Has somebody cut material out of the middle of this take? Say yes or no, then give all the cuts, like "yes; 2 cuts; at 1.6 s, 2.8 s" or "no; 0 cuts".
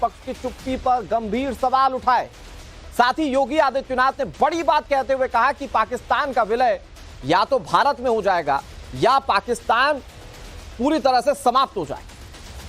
yes; 1 cut; at 8.8 s